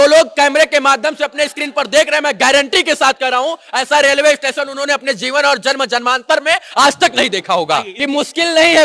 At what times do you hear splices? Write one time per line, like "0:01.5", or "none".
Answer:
0:07.9